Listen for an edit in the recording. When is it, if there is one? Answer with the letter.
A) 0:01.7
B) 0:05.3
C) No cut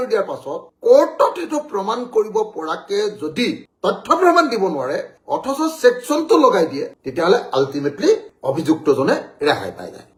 C